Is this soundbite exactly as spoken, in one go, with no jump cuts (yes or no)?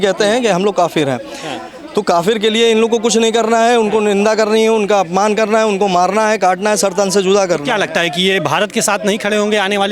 yes